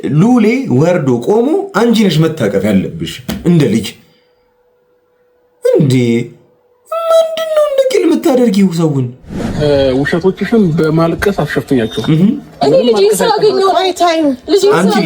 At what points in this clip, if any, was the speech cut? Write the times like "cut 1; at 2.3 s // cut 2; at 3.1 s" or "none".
cut 1; at 9.5 s